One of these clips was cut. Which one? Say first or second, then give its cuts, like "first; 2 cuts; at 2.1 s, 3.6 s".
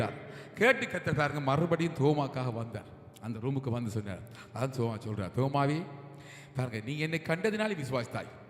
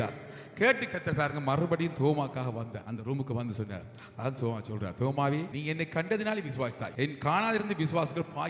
second; 3 cuts; at 2.8 s, 5.5 s, 6.8 s